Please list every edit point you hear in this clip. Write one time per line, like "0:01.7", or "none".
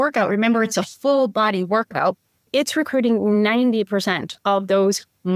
0:02.5